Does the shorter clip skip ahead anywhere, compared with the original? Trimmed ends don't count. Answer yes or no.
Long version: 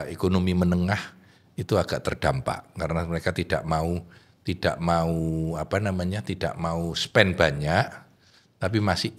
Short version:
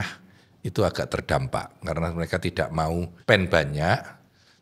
yes